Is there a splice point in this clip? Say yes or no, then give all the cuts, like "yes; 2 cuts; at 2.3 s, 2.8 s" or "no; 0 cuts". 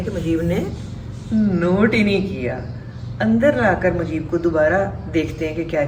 no; 0 cuts